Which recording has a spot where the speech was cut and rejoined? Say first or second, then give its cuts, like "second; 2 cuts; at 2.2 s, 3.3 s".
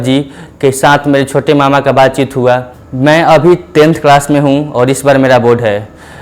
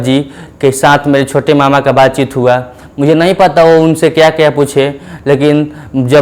first; 1 cut; at 2.8 s